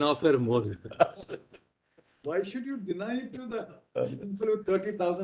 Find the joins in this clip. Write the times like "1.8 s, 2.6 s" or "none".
none